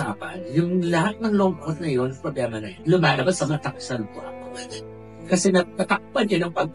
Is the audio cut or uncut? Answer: cut